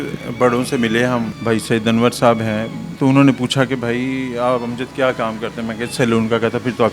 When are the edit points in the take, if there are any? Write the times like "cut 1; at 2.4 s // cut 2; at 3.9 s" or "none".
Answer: cut 1; at 1.3 s // cut 2; at 2.8 s

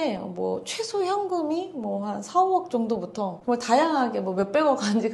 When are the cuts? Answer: none

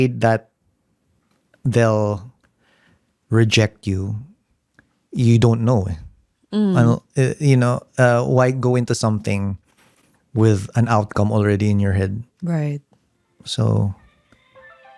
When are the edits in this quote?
none

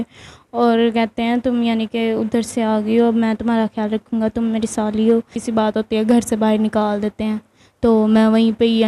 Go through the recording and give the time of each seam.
cut 1; at 5.4 s

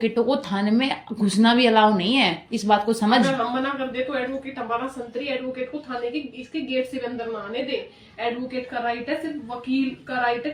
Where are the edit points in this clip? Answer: none

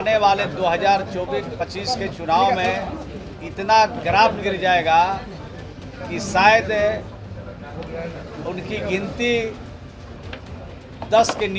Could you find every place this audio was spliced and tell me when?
none

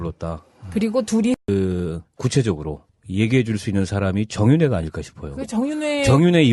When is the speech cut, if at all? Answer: none

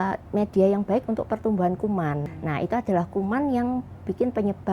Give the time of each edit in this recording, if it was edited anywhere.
cut 1; at 2.2 s

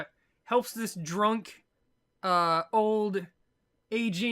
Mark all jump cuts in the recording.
cut 1; at 2.5 s

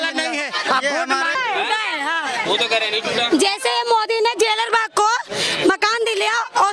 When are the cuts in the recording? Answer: cut 1; at 1.3 s

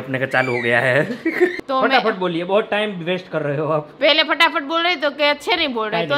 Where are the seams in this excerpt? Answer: cut 1; at 1.5 s

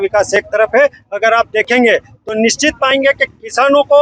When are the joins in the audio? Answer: none

